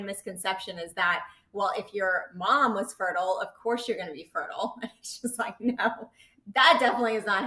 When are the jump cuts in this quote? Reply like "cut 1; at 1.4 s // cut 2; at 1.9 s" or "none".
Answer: none